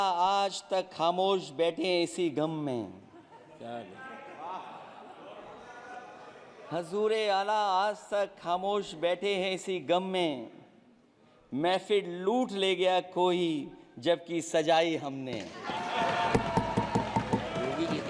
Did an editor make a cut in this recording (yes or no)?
no